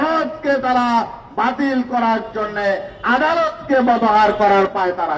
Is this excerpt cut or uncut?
uncut